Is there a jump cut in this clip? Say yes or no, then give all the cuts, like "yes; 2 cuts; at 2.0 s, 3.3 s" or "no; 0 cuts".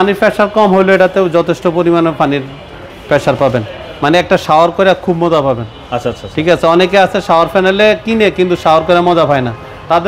no; 0 cuts